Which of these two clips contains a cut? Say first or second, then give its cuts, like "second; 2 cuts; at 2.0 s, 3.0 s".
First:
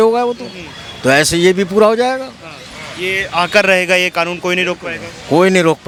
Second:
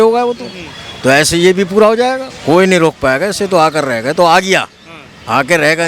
second; 1 cut; at 2.3 s